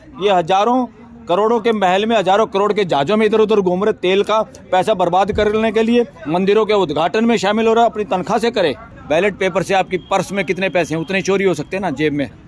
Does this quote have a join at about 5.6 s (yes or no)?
no